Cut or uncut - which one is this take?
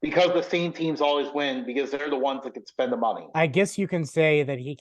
cut